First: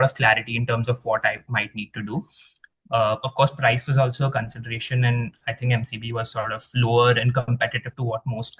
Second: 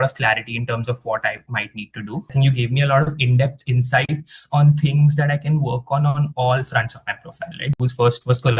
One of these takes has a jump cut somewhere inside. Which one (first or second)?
second